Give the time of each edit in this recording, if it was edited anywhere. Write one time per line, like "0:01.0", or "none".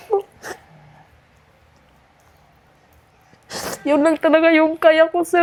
none